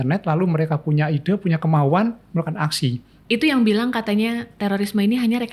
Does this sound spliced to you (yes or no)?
yes